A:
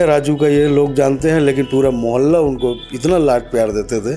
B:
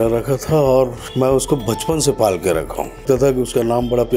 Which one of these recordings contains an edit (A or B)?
B